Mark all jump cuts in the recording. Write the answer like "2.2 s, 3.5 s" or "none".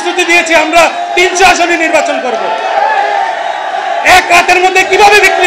none